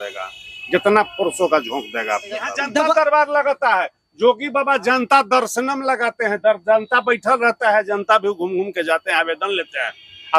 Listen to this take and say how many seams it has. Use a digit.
1